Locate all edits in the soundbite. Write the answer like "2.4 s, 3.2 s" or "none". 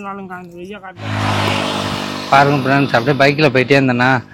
1.1 s